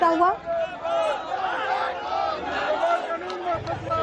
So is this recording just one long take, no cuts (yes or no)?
no